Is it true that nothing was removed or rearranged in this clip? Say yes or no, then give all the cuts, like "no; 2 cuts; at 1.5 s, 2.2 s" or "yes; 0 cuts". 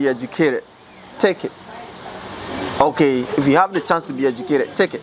yes; 0 cuts